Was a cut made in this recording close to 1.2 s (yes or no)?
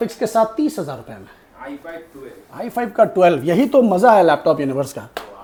no